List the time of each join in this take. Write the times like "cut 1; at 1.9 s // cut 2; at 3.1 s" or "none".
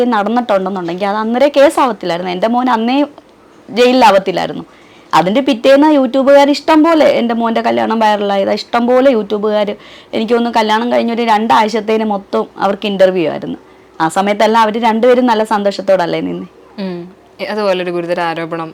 none